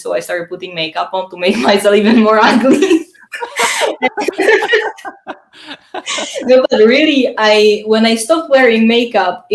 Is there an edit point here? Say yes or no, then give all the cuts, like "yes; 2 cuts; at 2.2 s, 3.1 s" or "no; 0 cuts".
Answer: no; 0 cuts